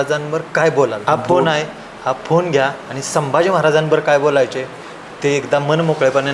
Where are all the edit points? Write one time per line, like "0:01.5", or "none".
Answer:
0:01.0